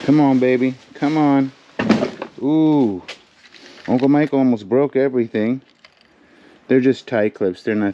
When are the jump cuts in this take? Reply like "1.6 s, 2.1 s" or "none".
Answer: none